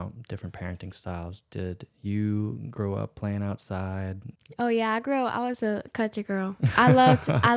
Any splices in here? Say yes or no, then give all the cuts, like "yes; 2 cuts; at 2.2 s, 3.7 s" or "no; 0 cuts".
yes; 1 cut; at 4.3 s